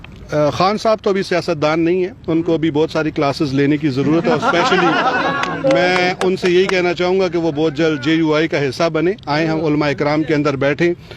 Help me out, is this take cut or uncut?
uncut